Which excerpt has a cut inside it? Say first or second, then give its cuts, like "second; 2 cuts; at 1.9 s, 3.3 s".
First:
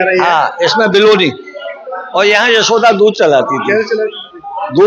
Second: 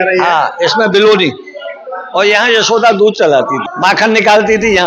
second; 1 cut; at 3.6 s